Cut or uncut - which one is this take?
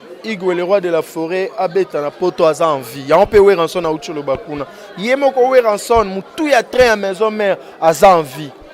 uncut